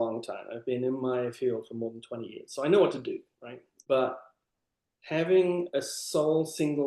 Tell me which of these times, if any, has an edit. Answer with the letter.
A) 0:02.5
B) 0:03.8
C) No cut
B